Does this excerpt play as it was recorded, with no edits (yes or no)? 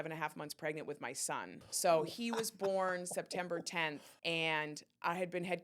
no